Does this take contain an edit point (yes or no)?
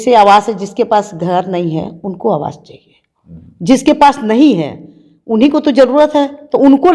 no